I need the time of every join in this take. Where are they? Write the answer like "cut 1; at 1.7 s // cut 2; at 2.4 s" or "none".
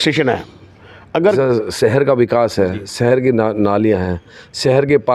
cut 1; at 1.3 s